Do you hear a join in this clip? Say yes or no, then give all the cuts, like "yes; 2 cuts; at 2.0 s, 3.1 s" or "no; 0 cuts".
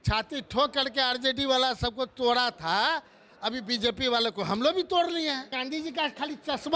yes; 1 cut; at 5.5 s